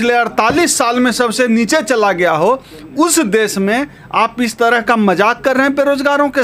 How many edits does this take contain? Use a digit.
0